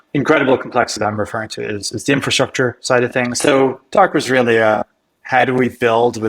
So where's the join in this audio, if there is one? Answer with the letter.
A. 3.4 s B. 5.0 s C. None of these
A